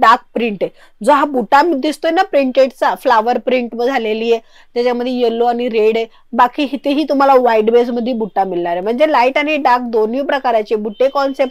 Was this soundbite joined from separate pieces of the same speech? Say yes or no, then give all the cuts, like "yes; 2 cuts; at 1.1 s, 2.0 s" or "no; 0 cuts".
no; 0 cuts